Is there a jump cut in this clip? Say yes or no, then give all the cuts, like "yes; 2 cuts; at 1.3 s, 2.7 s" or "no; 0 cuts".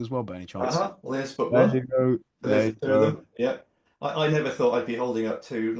no; 0 cuts